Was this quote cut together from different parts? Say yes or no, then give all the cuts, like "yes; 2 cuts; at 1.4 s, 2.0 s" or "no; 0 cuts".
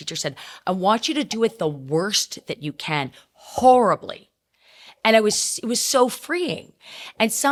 no; 0 cuts